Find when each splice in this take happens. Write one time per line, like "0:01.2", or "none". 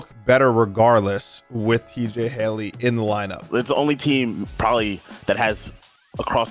0:03.5